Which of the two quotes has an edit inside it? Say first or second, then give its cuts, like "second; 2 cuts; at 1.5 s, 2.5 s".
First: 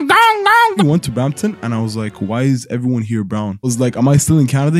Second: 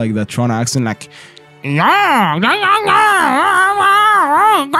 first; 2 cuts; at 0.8 s, 3.7 s